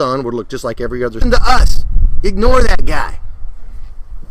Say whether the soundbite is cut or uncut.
uncut